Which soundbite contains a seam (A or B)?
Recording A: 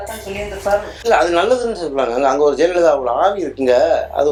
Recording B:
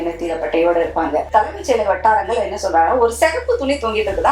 B